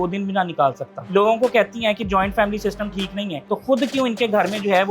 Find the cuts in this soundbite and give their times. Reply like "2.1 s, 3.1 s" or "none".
0.9 s, 3.4 s